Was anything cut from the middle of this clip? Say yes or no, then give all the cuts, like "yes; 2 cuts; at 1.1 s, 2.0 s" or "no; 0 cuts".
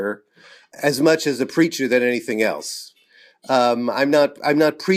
no; 0 cuts